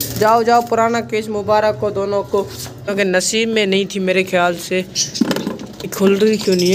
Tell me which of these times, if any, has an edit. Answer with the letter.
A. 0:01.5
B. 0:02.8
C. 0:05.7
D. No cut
B